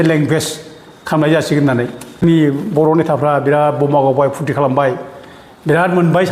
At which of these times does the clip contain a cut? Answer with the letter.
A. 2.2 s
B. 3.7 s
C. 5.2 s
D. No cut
A